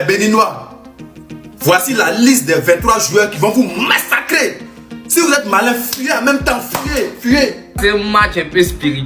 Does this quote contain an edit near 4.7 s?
no; 1 cut; at 7.8 s

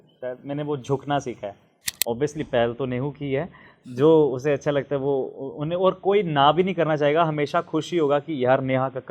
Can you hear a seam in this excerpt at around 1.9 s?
yes; 1 cut; at 1.9 s

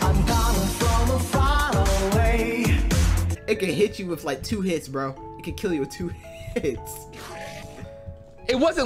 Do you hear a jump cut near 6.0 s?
no; 1 cut; at 3.2 s

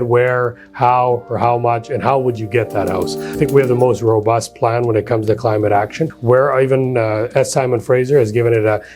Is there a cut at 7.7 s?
no; 2 cuts; at 3.4 s, 6.1 s

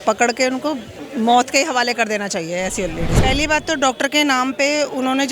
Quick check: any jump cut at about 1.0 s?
yes; 2 cuts; at 1.0 s, 3.2 s

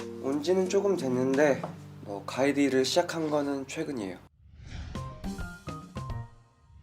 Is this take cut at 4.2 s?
yes; 1 cut; at 4.2 s

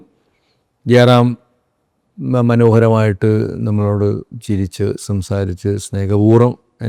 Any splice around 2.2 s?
no; 0 cuts

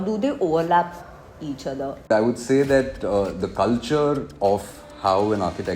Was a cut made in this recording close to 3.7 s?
no; 1 cut; at 2.1 s

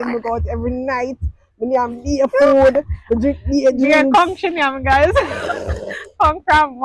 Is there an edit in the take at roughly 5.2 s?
no; 0 cuts

